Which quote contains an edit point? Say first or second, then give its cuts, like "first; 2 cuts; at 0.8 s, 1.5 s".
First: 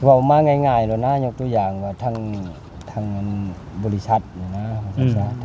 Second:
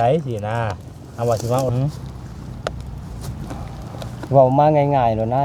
second; 1 cut; at 1.7 s